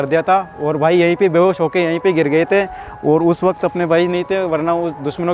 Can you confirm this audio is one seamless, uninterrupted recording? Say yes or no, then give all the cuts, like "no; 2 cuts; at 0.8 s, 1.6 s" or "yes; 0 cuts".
yes; 0 cuts